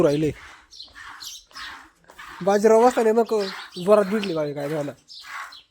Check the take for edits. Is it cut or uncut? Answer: uncut